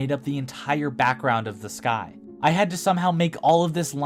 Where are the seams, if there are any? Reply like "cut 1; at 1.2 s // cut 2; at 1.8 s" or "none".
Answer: none